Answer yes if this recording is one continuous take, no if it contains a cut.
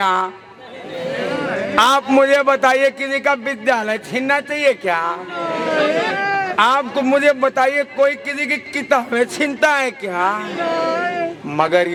yes